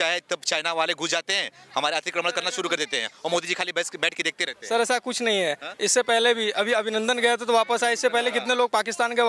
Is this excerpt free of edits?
yes; 0 cuts

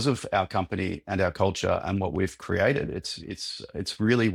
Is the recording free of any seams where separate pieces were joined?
yes; 0 cuts

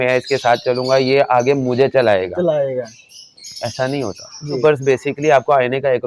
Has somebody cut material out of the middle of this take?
yes; 1 cut; at 4.6 s

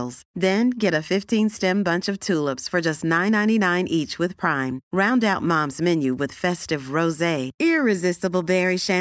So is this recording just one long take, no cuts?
yes; 0 cuts

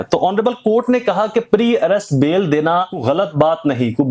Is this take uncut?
no; 1 cut; at 3.0 s

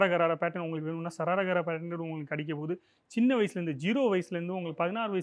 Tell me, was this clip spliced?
no; 0 cuts

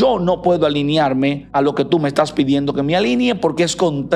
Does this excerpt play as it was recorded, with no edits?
no; 1 cut; at 1.4 s

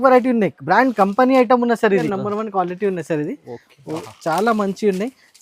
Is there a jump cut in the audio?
yes; 1 cut; at 2.1 s

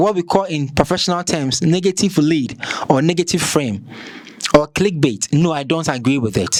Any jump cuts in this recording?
no; 0 cuts

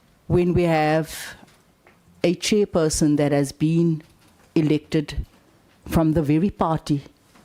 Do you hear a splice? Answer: no; 0 cuts

